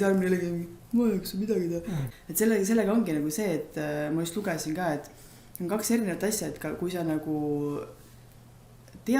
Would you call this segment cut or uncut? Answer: cut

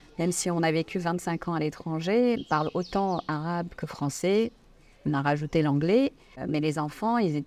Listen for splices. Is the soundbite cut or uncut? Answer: uncut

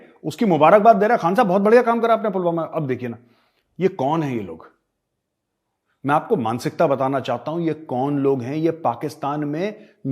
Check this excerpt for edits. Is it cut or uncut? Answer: uncut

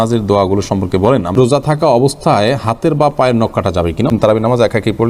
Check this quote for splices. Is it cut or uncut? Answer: cut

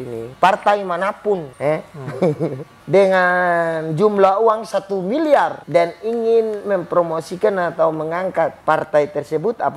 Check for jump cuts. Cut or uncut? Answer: cut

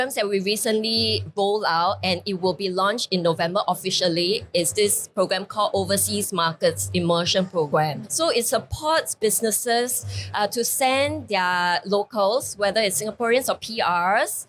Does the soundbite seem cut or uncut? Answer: uncut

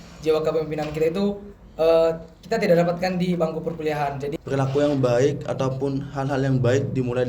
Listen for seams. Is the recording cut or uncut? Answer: cut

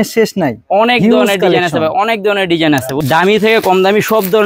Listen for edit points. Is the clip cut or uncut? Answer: cut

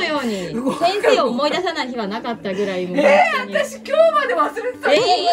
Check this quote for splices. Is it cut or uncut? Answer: uncut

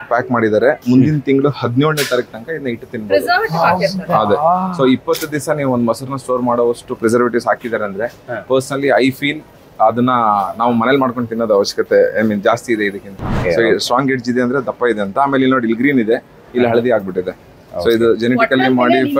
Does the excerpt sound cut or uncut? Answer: cut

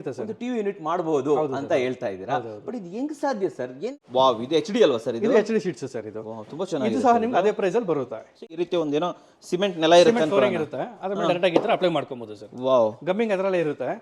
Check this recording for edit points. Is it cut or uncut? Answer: cut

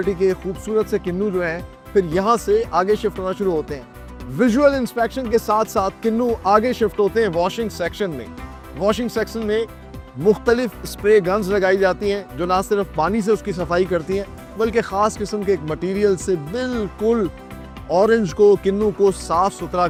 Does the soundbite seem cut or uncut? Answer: uncut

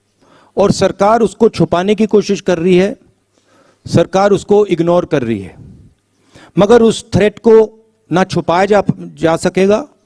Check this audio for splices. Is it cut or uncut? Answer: uncut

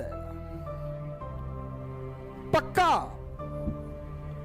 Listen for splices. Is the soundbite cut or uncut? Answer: cut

